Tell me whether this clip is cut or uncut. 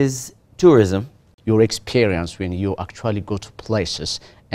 cut